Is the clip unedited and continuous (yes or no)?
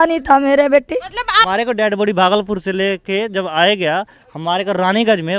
no